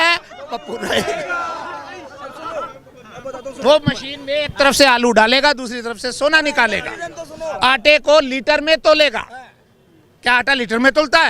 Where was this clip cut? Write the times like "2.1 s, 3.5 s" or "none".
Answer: none